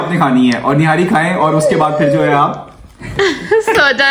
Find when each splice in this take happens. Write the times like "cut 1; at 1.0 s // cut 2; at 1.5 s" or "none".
none